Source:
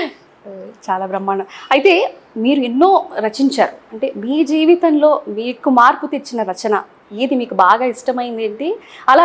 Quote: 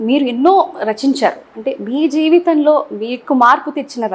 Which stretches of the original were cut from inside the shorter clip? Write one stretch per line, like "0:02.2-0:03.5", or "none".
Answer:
none